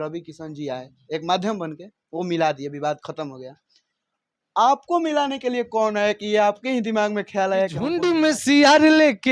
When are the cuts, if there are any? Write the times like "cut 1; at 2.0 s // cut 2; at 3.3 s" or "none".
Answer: cut 1; at 8.0 s